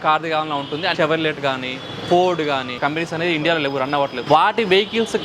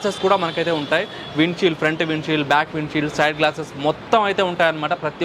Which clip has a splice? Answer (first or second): first